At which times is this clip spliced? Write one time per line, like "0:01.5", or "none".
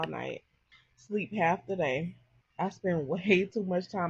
0:02.1